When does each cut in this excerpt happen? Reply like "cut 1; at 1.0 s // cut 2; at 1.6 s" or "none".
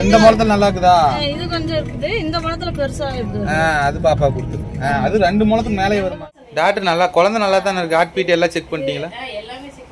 cut 1; at 6.1 s